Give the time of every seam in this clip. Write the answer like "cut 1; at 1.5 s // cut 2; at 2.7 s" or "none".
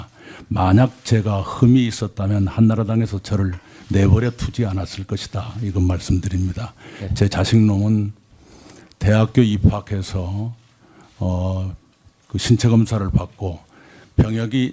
cut 1; at 7.9 s